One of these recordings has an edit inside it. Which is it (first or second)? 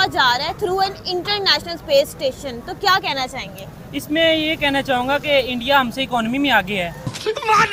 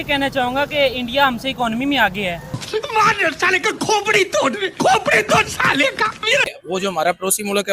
second